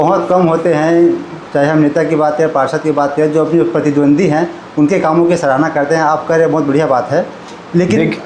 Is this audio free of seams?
yes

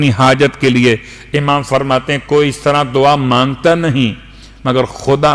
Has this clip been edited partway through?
no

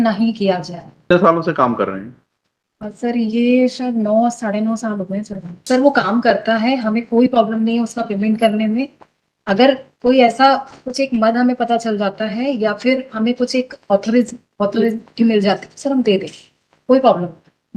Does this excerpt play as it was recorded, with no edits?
no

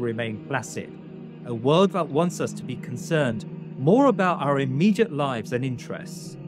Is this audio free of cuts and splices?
yes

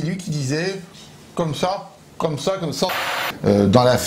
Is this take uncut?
no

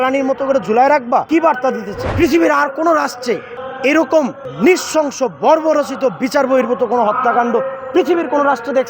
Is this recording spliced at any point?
yes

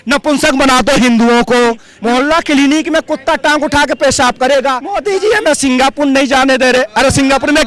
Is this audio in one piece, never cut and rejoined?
no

